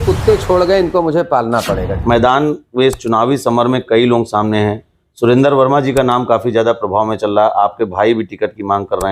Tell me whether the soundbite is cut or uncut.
cut